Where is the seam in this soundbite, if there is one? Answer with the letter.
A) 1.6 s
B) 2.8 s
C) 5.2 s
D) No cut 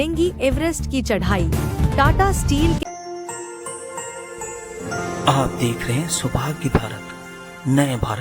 B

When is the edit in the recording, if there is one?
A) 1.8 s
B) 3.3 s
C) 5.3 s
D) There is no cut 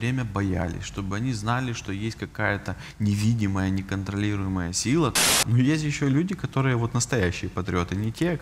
C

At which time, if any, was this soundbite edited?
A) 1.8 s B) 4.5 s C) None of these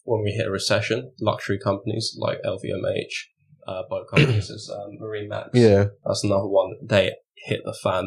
C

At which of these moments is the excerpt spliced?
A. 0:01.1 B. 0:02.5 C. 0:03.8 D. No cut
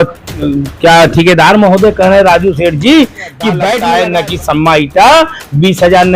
C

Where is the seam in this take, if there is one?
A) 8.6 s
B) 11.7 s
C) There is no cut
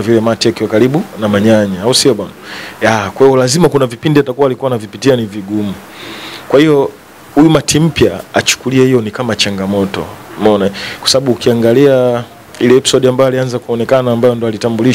C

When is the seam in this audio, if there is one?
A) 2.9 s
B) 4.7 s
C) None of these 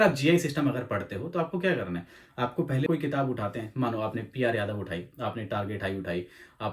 A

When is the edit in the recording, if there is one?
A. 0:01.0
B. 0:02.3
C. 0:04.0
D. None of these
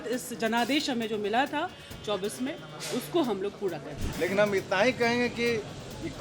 C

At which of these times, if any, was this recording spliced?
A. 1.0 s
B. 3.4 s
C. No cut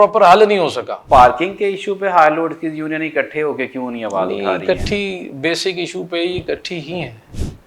A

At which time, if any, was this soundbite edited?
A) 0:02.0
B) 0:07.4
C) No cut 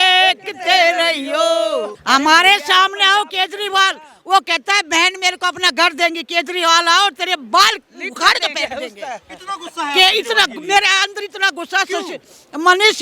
A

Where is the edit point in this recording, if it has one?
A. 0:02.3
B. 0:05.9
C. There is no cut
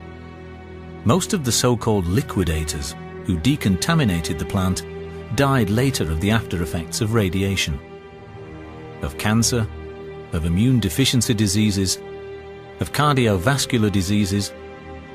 A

